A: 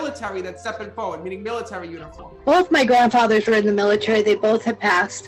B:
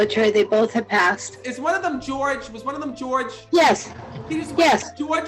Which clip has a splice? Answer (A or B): B